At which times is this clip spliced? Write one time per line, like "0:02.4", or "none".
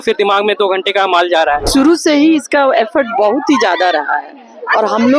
0:01.7